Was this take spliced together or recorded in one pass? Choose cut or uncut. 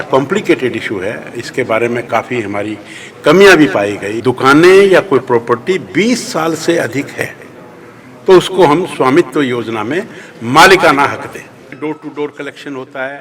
cut